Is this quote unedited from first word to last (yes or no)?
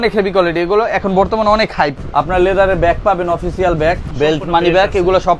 no